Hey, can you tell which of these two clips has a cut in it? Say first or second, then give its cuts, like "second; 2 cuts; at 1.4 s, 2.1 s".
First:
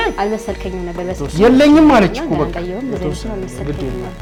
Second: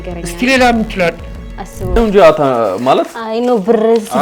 second; 1 cut; at 2.0 s